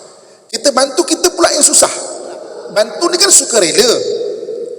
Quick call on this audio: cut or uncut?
cut